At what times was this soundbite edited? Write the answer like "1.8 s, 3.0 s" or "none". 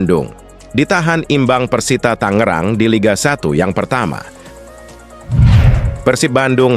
4.6 s, 5.9 s